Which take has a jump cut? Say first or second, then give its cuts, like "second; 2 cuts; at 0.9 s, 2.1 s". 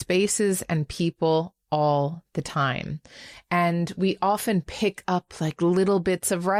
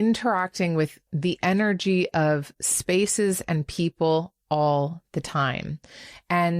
second; 1 cut; at 1.0 s